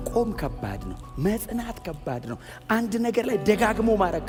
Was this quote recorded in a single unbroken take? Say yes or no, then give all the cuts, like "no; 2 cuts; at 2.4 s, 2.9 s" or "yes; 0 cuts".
yes; 0 cuts